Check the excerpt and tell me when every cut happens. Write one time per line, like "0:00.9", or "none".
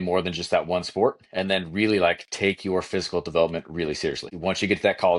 0:04.3